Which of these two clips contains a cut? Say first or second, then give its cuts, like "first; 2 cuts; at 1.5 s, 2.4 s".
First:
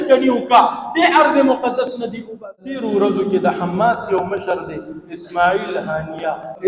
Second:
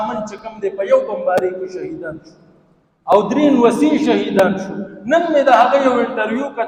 first; 1 cut; at 2.8 s